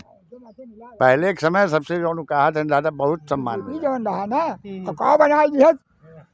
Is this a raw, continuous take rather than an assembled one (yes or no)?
no